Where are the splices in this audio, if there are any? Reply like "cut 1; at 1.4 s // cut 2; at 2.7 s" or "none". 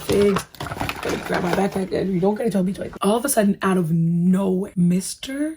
cut 1; at 2.9 s